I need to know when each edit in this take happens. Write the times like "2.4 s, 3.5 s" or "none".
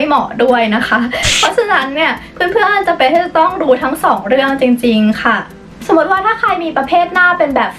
none